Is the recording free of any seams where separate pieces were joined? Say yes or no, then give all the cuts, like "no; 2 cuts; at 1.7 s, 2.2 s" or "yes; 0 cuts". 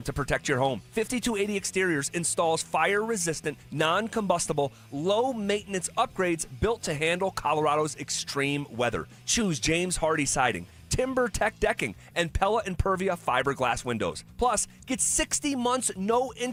yes; 0 cuts